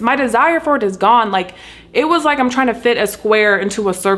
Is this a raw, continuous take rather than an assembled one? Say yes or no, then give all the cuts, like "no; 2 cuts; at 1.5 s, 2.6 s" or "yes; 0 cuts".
yes; 0 cuts